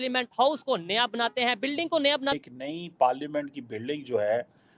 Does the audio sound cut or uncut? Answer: cut